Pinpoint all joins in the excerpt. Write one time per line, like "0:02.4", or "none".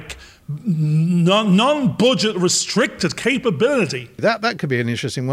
0:04.2